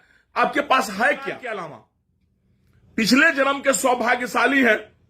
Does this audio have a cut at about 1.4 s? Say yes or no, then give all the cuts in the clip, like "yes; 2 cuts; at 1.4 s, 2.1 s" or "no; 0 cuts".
yes; 1 cut; at 1.4 s